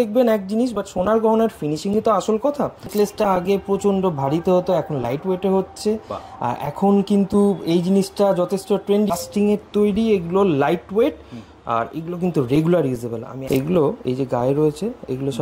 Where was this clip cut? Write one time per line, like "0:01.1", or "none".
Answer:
0:02.9
0:09.1
0:13.3